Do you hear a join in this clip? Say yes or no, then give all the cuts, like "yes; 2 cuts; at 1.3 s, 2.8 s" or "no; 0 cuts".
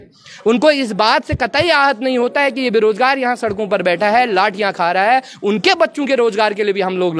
no; 0 cuts